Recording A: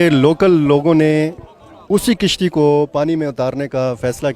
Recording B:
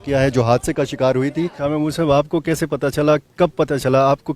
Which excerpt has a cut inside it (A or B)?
B